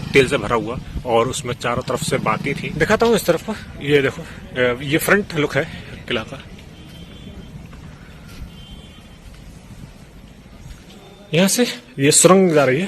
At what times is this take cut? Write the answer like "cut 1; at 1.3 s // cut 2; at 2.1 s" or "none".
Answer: cut 1; at 2.7 s // cut 2; at 11.1 s